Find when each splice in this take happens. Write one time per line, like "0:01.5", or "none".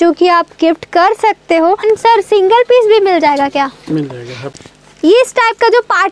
0:01.8
0:04.6